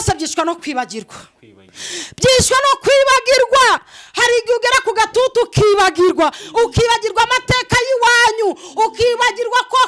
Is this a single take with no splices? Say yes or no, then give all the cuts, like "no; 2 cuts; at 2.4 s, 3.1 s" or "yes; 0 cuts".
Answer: yes; 0 cuts